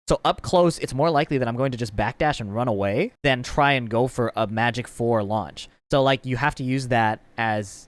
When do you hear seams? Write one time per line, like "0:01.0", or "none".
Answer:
0:00.9
0:03.1